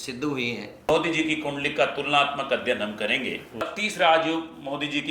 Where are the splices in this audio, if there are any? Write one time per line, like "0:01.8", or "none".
0:00.9
0:03.6